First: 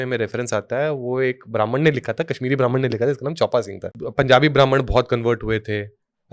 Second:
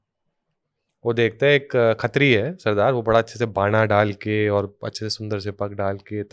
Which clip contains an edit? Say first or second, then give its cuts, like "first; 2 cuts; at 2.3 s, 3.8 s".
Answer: first; 1 cut; at 4.0 s